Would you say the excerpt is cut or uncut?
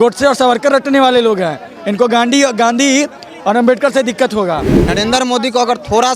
cut